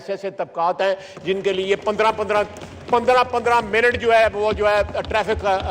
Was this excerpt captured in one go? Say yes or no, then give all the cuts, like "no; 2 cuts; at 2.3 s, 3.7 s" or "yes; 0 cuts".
yes; 0 cuts